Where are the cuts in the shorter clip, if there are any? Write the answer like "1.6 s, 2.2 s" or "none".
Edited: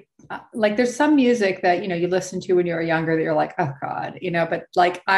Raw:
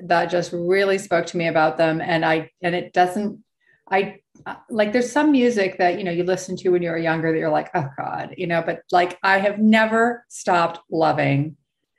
none

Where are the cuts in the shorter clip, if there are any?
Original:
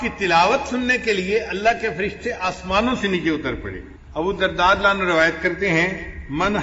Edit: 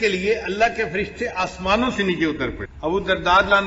2.7 s

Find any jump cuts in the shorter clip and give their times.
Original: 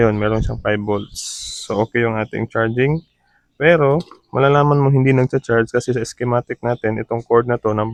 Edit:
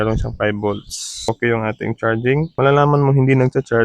1.3 s, 2.5 s

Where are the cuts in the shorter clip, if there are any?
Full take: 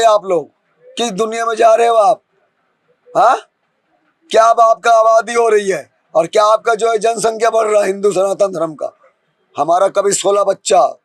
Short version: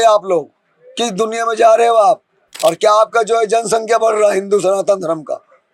2.4 s

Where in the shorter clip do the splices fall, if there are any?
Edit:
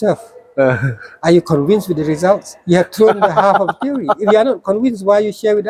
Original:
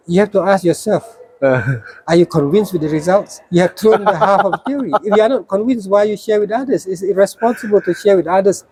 none

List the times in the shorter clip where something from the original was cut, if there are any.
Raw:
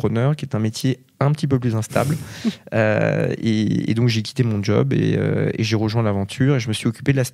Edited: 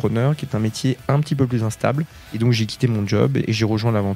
1.0 s, 2.3 s, 3.4 s

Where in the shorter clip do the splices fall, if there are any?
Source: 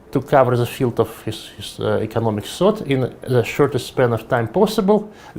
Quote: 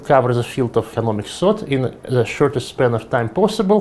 0.9 s

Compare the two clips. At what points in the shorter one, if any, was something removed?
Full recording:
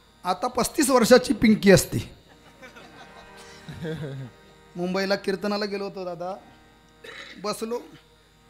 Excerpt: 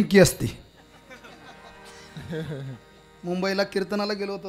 none

